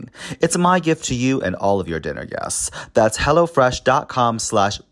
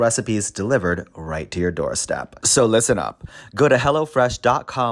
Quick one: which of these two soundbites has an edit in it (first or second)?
second